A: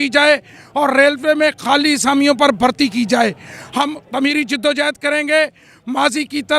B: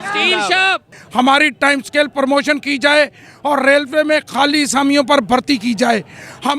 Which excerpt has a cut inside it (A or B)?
B